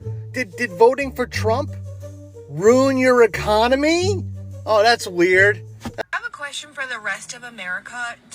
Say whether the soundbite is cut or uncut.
cut